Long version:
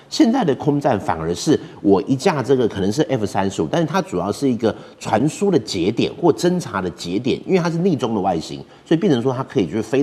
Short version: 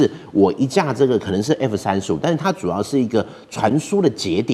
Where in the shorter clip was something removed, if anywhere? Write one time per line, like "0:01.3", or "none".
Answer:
none

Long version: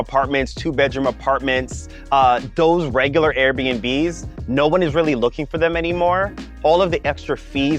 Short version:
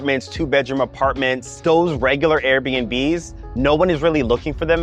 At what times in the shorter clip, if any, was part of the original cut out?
0:01.5

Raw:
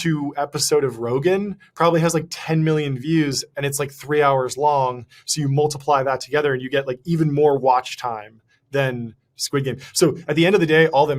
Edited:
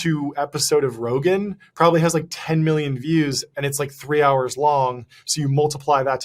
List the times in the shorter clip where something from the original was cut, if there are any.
none

